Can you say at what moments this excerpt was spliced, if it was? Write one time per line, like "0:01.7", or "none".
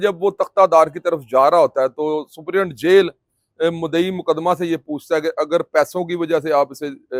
none